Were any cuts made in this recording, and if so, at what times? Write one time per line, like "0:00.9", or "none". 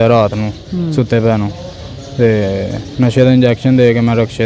none